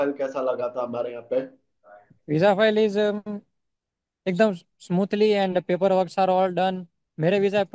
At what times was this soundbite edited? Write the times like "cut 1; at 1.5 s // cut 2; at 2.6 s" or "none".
none